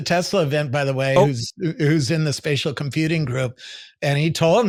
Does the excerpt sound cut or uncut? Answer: uncut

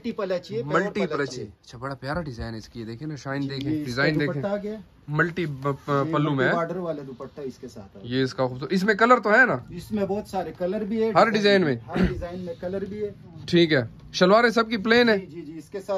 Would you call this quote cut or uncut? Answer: uncut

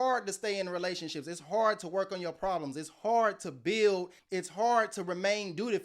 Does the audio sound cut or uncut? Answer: cut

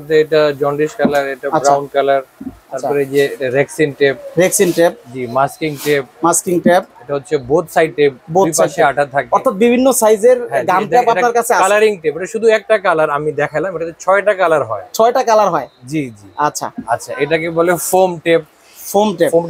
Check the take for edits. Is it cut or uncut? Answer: uncut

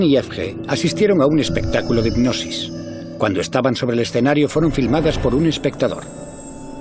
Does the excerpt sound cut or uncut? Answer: cut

